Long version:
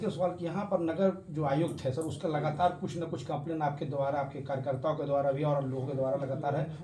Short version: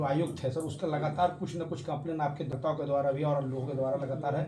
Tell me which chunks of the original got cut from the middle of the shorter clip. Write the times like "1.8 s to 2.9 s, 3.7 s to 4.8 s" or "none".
3.9 s to 4.7 s